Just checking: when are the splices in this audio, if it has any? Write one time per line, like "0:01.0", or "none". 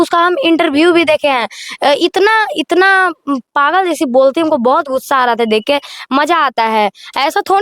none